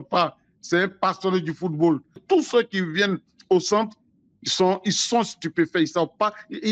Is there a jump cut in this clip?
yes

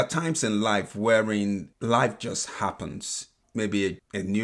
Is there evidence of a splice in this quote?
yes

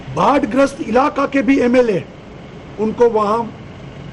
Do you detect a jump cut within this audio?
no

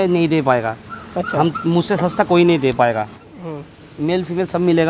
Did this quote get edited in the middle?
yes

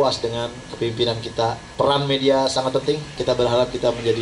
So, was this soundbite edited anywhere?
yes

